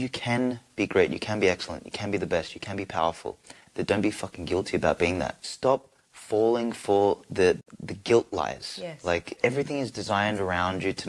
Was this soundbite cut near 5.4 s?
yes; 3 cuts; at 5.4 s, 7.6 s, 9.3 s

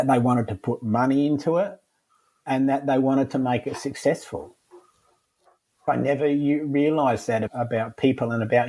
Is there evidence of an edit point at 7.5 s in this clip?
yes; 2 cuts; at 5.8 s, 7.5 s

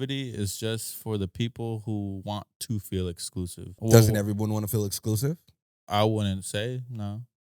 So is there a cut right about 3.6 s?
yes; 1 cut; at 3.6 s

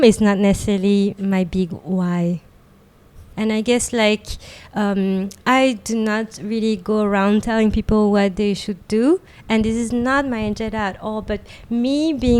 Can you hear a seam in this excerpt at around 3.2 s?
yes; 1 cut; at 3.2 s

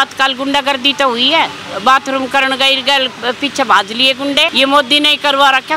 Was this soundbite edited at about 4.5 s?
yes; 1 cut; at 4.5 s

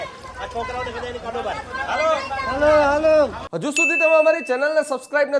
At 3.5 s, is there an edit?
yes; 1 cut; at 3.5 s

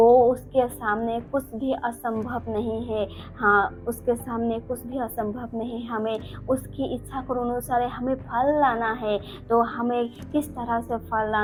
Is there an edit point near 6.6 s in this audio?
no; 0 cuts

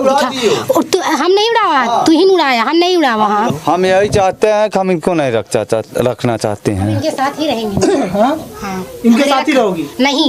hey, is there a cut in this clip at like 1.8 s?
no; 1 cut; at 3.5 s

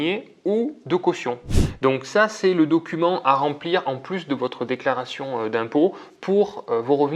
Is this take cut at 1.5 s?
yes; 1 cut; at 1.5 s

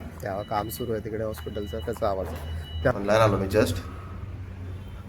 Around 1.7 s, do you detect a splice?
no; 1 cut; at 2.9 s

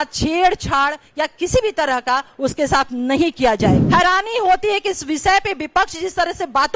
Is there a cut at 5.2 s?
no; 1 cut; at 3.8 s

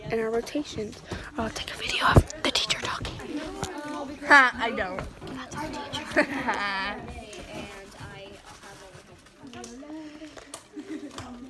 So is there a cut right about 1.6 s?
no; 2 cuts; at 3.0 s, 9.5 s

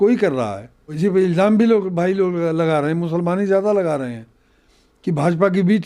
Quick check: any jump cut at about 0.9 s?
yes; 1 cut; at 0.9 s

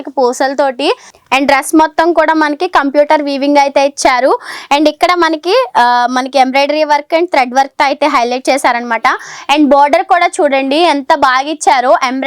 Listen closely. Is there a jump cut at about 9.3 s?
no; 1 cut; at 1.1 s

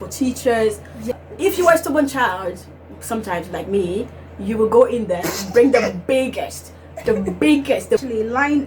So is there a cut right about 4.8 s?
no; 2 cuts; at 1.1 s, 8.0 s

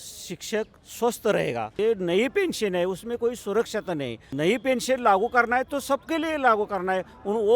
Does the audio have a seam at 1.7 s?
yes; 2 cuts; at 1.7 s, 4.2 s

